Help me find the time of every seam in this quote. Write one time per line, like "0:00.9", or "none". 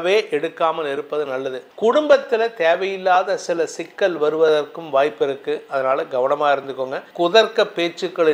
0:01.6
0:07.0